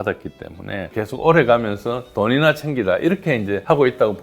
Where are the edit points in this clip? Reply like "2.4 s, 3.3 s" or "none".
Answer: 0.9 s